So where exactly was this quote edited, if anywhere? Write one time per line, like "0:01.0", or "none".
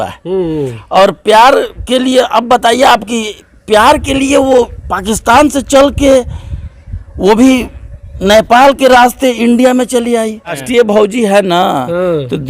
0:10.6